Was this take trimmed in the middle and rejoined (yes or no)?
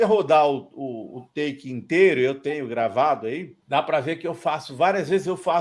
yes